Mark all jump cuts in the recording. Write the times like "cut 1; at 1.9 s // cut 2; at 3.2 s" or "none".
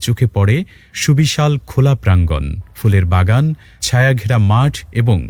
none